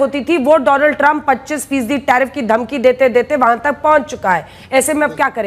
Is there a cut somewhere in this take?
no; 0 cuts

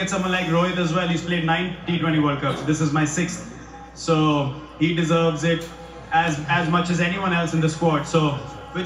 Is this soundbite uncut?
yes; 0 cuts

